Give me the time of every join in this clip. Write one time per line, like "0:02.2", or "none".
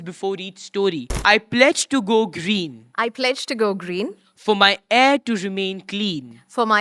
0:01.1